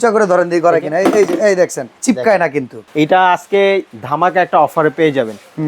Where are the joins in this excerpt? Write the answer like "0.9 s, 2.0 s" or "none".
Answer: 1.9 s, 2.8 s, 4.0 s

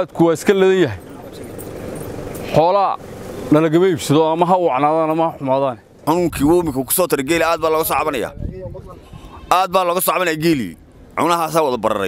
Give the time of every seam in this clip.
6.0 s

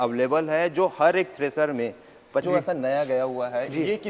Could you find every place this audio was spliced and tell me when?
2.5 s

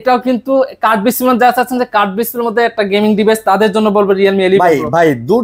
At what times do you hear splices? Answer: none

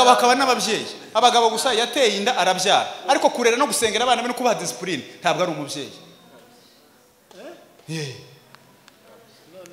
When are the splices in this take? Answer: none

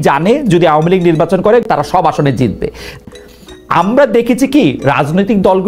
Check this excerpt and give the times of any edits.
1.7 s, 3.0 s

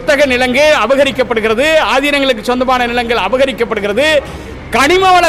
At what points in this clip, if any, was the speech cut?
none

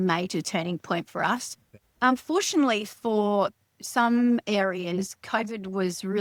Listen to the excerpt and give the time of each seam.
none

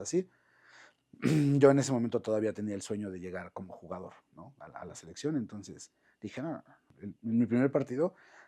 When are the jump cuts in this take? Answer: 6.8 s

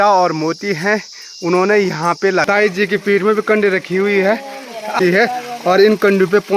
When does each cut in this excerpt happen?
2.4 s, 5.0 s

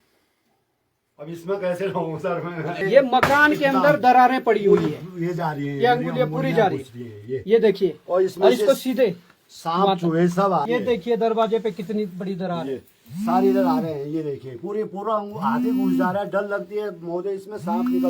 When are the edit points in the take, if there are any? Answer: 2.8 s, 10.7 s

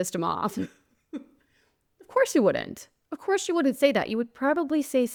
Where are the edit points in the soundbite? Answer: none

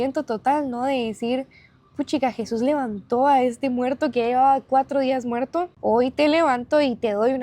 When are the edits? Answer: 5.7 s

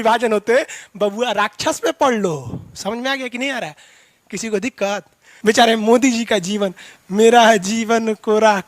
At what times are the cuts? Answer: 5.3 s

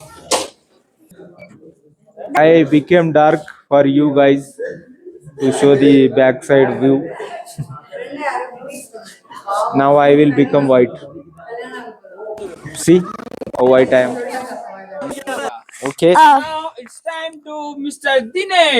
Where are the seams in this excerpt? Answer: 2.4 s, 15.5 s

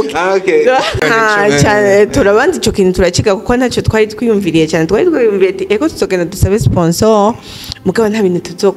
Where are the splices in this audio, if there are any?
1.0 s

